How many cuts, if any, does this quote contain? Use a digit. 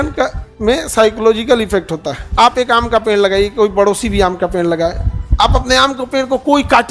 1